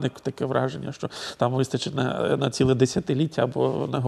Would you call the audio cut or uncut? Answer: uncut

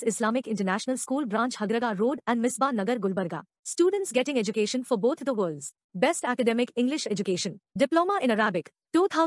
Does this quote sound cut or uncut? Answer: uncut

